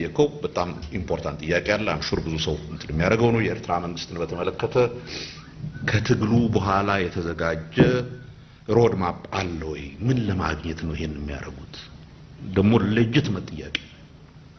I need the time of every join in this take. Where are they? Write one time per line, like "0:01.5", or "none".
none